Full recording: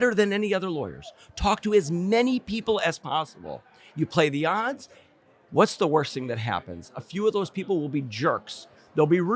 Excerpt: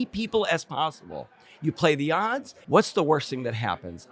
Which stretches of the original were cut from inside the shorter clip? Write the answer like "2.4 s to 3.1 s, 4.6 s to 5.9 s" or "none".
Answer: 4.8 s to 5.3 s